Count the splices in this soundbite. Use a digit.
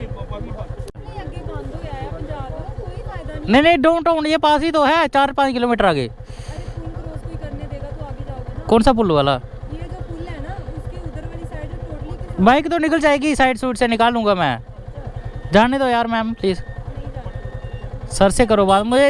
1